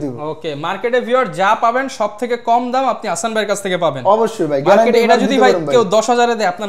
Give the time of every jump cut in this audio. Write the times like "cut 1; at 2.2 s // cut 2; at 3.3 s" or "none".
none